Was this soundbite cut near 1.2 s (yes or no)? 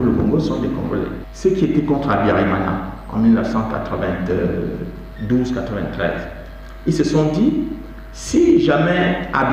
yes